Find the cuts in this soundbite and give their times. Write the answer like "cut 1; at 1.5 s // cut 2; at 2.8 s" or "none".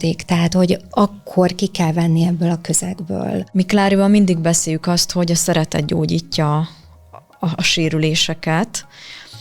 cut 1; at 3.4 s